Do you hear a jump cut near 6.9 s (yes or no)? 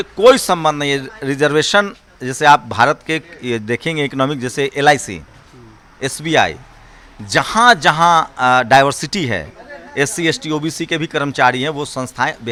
no